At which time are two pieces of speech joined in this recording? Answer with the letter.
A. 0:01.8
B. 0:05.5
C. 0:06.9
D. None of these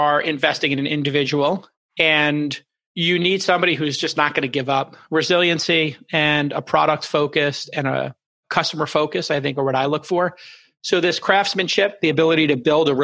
A